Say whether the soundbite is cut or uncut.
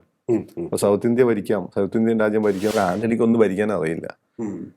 cut